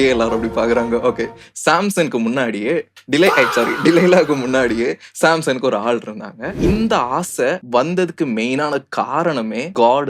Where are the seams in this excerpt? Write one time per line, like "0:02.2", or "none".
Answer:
0:06.6